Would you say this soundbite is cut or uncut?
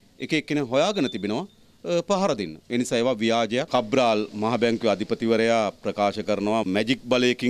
cut